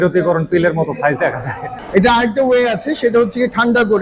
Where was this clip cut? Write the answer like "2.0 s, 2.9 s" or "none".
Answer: 1.8 s